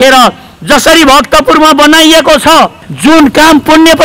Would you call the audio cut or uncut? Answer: cut